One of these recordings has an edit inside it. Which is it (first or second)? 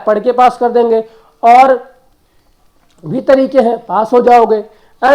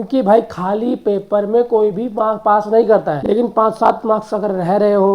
second